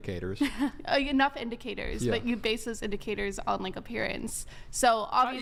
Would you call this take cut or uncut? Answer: uncut